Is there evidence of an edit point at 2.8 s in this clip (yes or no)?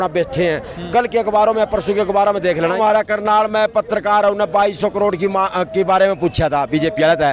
yes